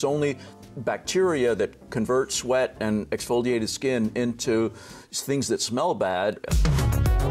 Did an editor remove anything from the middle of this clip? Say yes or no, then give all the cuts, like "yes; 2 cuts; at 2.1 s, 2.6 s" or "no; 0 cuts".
yes; 1 cut; at 6.4 s